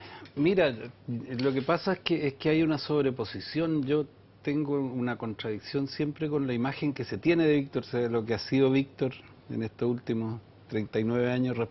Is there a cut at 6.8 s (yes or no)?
yes